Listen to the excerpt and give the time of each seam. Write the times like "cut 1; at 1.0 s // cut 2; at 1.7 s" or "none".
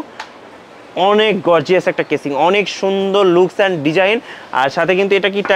none